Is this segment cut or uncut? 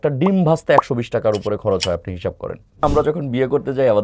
cut